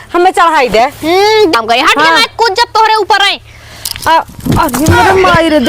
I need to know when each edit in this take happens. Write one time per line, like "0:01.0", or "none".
0:01.6